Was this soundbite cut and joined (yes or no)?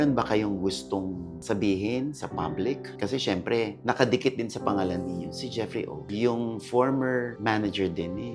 no